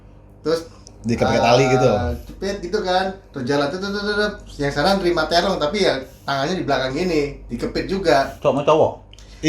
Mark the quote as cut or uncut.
uncut